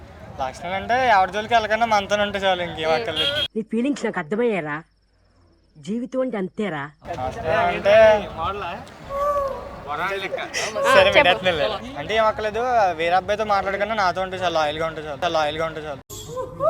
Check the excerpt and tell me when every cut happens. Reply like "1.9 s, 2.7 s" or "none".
6.9 s